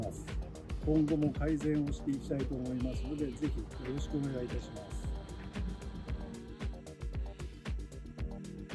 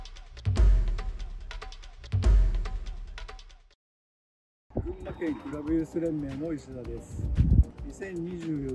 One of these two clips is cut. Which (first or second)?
second